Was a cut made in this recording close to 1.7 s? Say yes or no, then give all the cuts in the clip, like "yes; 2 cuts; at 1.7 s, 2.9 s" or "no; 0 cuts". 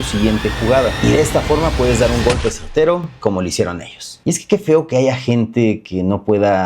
no; 1 cut; at 4.1 s